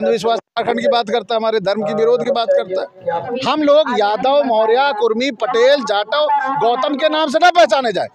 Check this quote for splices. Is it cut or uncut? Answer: cut